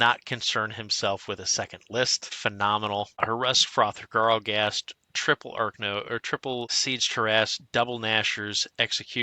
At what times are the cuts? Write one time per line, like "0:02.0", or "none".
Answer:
0:02.2
0:03.2
0:06.7